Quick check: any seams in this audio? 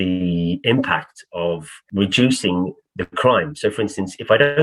yes; 2 cuts; at 1.8 s, 2.8 s

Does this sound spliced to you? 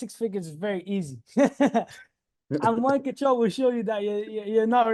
no; 0 cuts

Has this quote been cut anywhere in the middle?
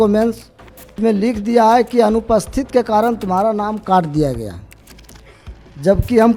yes; 1 cut; at 0.9 s

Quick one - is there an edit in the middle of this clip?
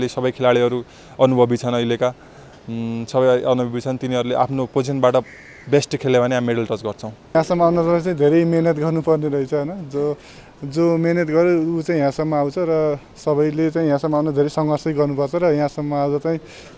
yes; 1 cut; at 7.2 s

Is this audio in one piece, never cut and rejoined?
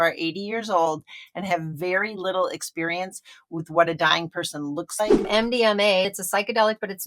no; 2 cuts; at 5.3 s, 6.1 s

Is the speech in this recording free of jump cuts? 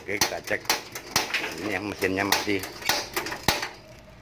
no; 1 cut; at 3.3 s

